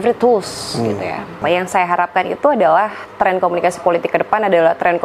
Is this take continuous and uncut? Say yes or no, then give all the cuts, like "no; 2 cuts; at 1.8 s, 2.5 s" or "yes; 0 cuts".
no; 1 cut; at 1.4 s